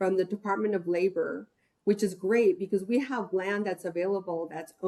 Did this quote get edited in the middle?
no; 0 cuts

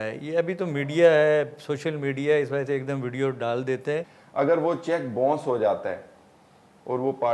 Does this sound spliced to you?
yes; 1 cut; at 4.2 s

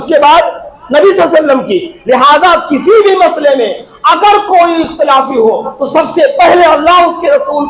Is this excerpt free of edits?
yes; 0 cuts

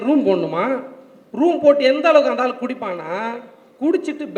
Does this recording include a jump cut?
no; 0 cuts

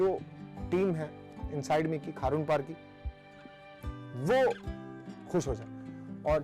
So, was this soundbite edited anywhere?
no; 0 cuts

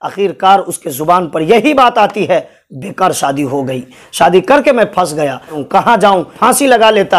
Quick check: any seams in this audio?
yes; 2 cuts; at 5.6 s, 6.3 s

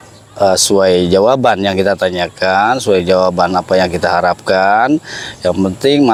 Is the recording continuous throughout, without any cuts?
yes; 0 cuts

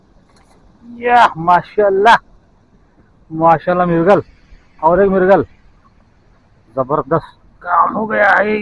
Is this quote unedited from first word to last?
yes; 0 cuts

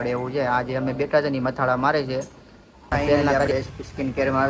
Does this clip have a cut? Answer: yes; 1 cut; at 3.5 s

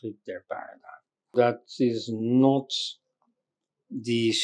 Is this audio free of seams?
no; 1 cut; at 1.3 s

